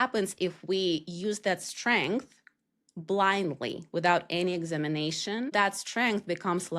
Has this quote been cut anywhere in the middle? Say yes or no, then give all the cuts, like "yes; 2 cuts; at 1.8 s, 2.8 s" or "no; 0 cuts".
yes; 1 cut; at 5.5 s